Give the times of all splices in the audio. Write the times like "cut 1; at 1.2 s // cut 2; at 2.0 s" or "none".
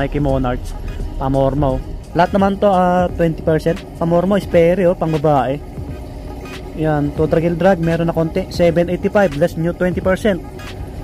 cut 1; at 2.0 s